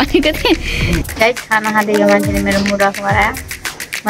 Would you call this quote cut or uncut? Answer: cut